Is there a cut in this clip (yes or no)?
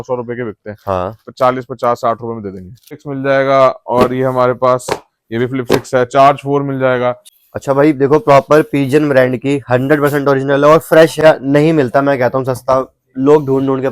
yes